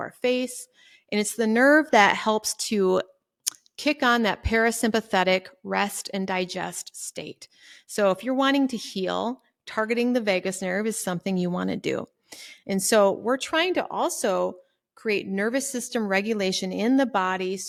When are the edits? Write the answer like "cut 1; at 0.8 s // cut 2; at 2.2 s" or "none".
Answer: none